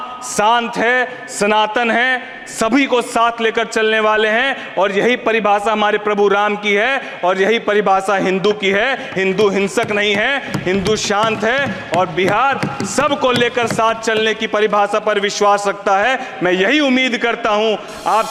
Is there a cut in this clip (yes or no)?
no